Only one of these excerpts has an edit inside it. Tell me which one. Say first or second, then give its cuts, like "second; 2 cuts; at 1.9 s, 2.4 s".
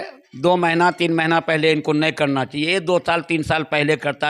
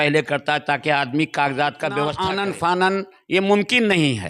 second; 1 cut; at 2.2 s